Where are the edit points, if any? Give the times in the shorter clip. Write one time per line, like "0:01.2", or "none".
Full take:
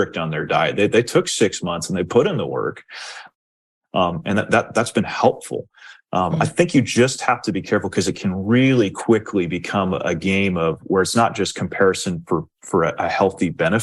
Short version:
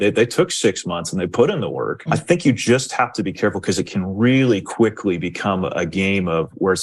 0:02.0

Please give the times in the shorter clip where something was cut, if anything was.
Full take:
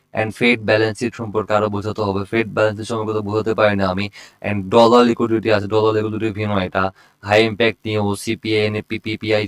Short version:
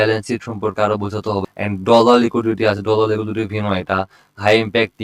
0:01.5

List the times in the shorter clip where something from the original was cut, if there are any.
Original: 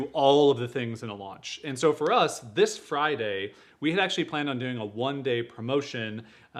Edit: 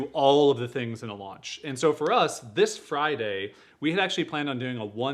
none

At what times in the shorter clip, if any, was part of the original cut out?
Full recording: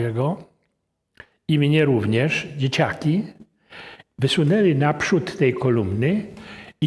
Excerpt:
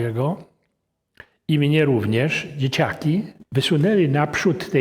0:03.4

